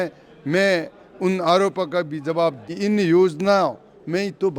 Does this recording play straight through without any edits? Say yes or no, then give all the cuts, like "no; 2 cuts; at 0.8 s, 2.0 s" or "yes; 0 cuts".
no; 1 cut; at 2.6 s